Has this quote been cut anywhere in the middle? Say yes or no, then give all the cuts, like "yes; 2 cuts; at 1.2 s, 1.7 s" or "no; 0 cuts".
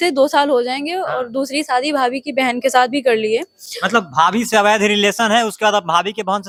no; 0 cuts